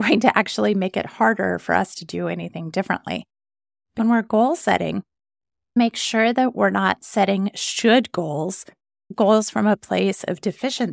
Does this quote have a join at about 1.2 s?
no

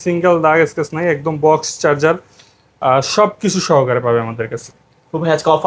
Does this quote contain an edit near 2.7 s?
no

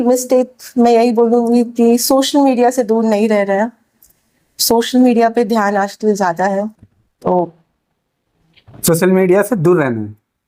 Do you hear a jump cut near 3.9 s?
no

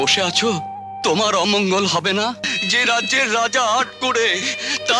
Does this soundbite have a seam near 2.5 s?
yes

